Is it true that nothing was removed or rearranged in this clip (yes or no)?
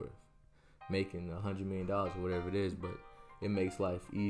yes